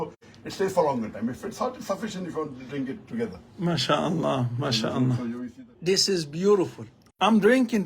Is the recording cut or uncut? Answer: cut